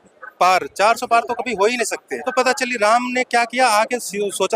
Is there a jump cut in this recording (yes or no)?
yes